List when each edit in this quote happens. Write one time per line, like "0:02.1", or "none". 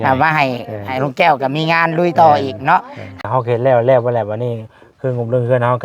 0:03.2